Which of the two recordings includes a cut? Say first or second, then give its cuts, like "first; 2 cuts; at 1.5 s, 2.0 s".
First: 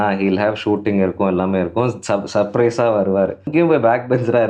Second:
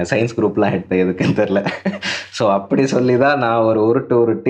first; 1 cut; at 3.5 s